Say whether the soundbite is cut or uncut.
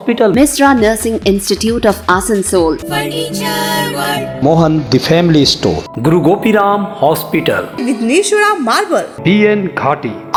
uncut